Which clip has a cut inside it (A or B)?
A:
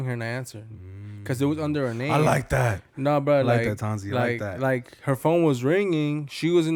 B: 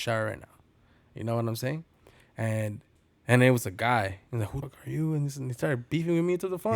B